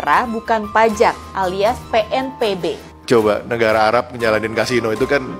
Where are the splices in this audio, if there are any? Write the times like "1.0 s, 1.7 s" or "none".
2.9 s